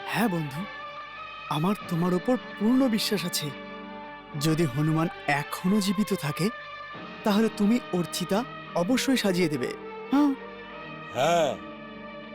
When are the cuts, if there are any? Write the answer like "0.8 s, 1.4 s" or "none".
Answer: none